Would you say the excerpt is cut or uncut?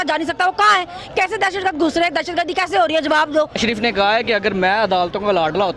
cut